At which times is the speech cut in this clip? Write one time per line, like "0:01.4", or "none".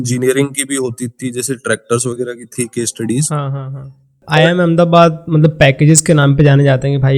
0:04.2